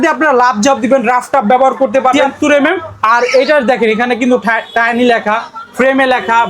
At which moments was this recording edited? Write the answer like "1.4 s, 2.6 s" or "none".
2.2 s